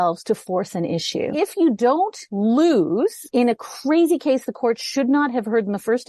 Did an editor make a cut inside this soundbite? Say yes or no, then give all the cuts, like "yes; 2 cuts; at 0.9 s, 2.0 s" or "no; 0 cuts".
yes; 3 cuts; at 1.3 s, 2.2 s, 3.2 s